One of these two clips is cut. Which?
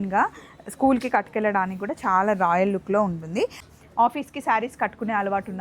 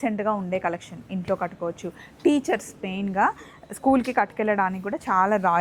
first; 1 cut; at 3.6 s

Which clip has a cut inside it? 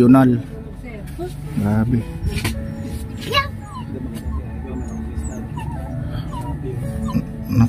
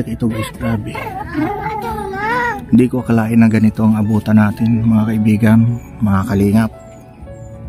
first; 1 cut; at 2.3 s

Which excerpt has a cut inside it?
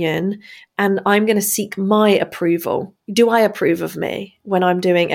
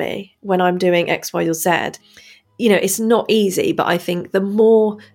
second; 1 cut; at 2.3 s

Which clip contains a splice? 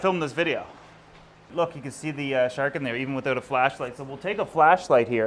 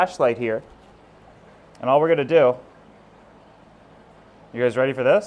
first; 1 cut; at 1.5 s

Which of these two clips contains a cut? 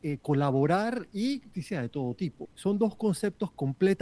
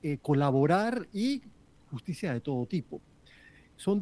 first; 2 cuts; at 1.5 s, 2.5 s

